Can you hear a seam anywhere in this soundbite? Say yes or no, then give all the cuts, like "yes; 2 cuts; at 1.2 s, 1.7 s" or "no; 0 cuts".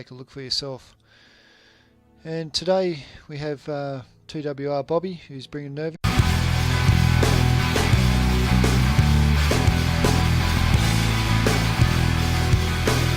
no; 0 cuts